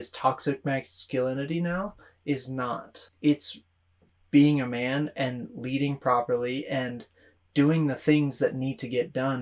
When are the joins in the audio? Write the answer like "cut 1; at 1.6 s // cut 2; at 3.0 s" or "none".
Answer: cut 1; at 3.1 s